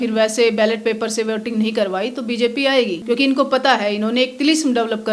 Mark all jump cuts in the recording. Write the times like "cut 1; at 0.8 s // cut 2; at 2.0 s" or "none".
cut 1; at 3.0 s